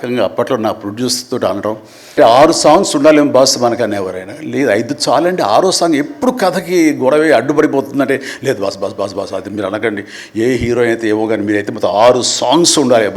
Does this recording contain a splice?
yes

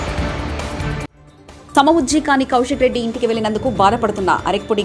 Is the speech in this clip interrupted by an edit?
no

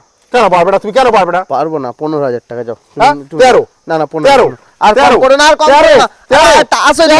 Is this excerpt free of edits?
yes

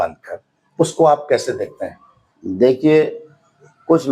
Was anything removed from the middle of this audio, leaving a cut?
no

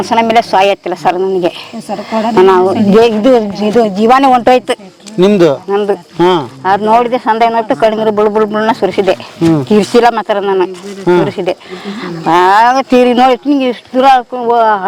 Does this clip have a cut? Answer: no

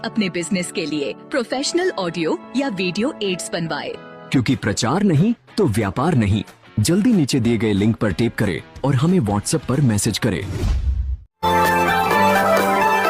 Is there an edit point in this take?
no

